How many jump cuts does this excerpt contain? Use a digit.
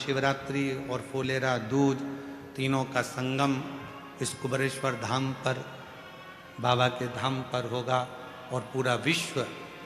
0